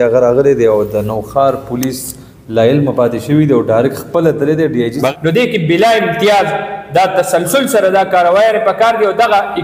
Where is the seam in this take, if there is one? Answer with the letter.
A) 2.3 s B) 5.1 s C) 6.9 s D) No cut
B